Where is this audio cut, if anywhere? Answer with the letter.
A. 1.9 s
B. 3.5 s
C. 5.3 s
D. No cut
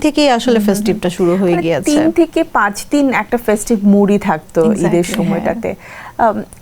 D